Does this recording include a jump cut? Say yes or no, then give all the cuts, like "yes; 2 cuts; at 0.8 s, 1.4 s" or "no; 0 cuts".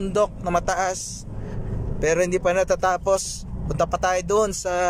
no; 0 cuts